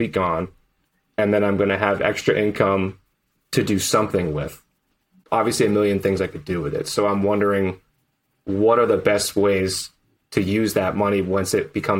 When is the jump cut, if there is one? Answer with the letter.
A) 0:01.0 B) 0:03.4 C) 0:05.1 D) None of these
C